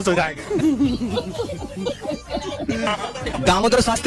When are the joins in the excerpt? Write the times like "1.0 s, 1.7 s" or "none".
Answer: none